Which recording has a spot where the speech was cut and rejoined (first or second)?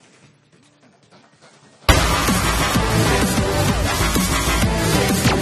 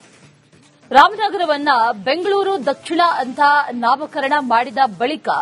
second